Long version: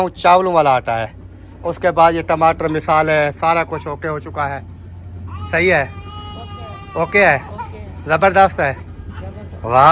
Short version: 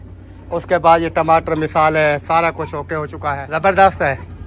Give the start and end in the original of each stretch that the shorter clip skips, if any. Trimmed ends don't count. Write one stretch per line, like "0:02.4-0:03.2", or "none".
0:04.6-0:08.0

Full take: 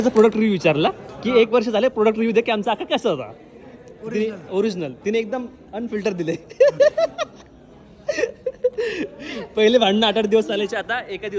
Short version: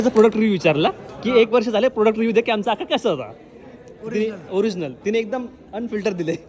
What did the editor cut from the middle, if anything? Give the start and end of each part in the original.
none

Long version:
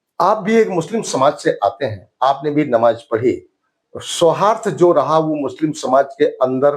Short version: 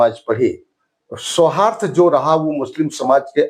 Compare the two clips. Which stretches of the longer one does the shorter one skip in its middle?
none

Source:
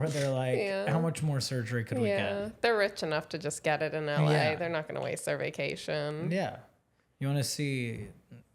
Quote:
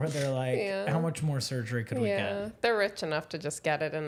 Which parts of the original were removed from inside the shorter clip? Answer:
none

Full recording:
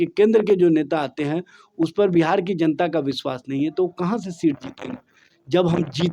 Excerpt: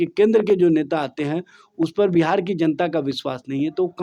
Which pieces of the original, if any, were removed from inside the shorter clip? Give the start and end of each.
none

